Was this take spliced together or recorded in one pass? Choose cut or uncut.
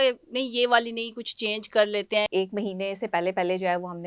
cut